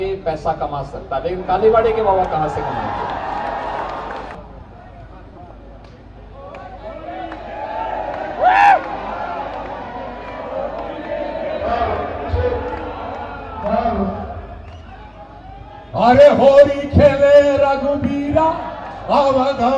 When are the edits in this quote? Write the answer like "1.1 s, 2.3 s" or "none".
4.3 s